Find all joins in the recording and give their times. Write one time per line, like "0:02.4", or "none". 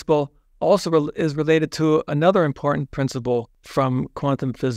0:03.6